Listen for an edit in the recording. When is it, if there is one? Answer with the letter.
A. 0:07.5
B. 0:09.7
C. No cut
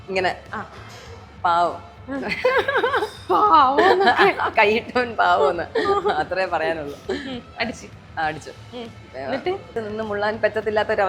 B